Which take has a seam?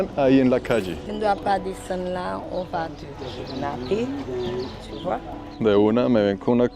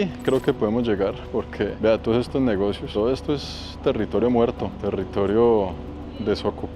first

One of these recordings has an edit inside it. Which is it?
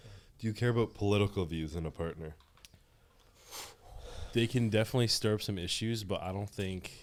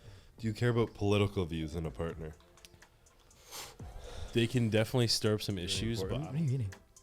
second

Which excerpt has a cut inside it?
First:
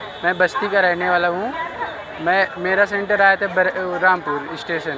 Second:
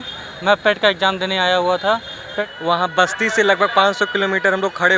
second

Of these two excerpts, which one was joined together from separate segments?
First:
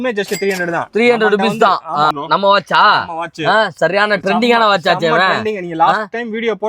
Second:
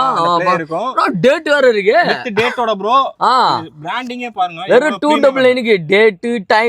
first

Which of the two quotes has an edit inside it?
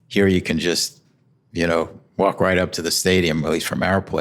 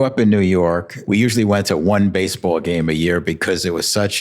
second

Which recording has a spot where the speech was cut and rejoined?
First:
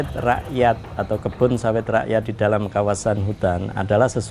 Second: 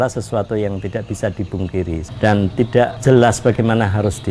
second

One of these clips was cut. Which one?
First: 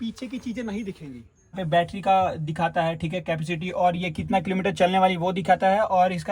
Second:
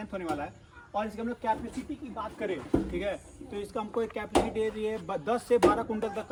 first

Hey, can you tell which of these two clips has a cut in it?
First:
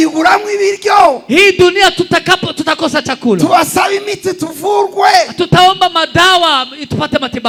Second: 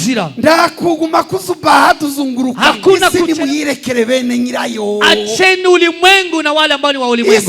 second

